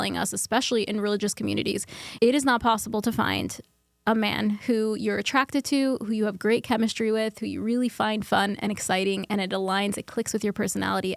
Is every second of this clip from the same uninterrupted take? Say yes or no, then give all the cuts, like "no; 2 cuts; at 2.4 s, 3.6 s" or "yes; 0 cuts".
yes; 0 cuts